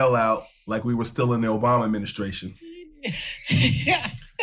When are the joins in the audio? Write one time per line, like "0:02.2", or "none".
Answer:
none